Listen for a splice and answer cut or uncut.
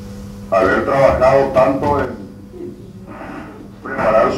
uncut